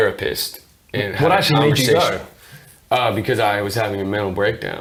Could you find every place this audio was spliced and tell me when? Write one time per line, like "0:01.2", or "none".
none